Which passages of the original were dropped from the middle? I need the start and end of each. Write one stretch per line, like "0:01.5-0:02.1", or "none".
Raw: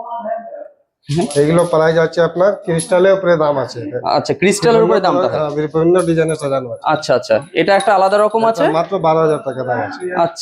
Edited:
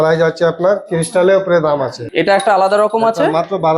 0:03.8-0:07.5